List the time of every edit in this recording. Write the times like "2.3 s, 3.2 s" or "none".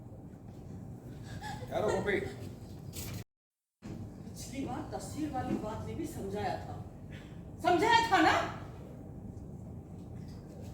3.3 s